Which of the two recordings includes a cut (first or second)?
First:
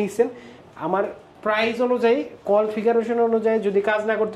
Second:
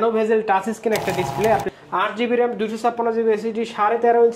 second